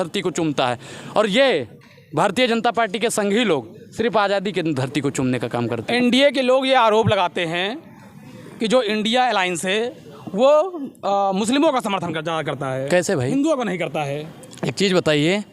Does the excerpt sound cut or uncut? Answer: uncut